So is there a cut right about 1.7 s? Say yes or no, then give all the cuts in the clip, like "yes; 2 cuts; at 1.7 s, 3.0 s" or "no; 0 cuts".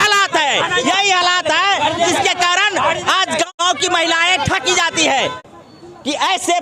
no; 2 cuts; at 3.5 s, 5.4 s